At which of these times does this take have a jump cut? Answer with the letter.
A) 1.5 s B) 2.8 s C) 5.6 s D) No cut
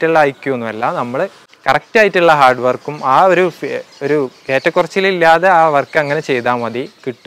A